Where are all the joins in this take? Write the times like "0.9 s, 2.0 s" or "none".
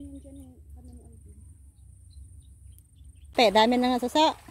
3.3 s